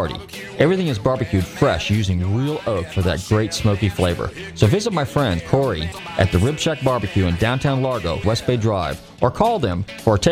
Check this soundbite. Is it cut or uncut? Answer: cut